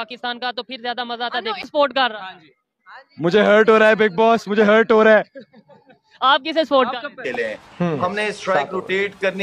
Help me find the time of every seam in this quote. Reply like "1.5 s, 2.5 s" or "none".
7.2 s